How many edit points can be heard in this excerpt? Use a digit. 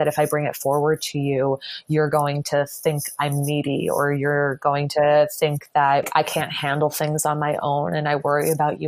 1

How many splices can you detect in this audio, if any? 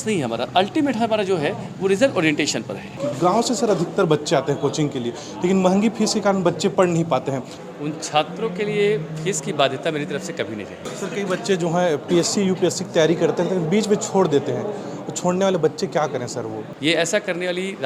4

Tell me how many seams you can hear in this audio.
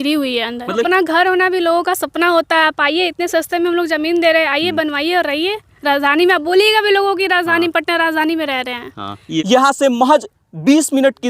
2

